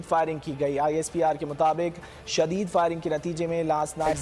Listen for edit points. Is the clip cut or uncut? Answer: uncut